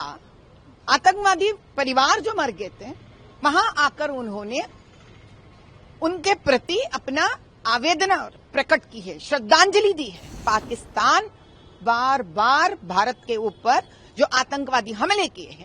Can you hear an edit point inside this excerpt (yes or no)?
yes